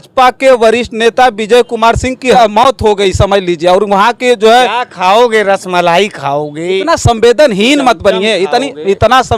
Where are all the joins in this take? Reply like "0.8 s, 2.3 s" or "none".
2.3 s